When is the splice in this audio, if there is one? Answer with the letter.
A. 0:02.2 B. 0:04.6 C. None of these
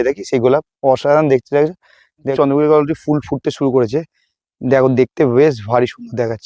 A